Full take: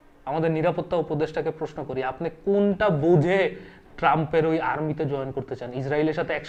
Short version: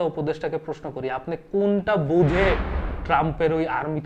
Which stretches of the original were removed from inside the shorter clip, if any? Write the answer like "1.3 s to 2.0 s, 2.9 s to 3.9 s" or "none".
none